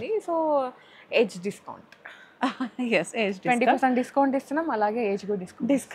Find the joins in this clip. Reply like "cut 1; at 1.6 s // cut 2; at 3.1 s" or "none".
none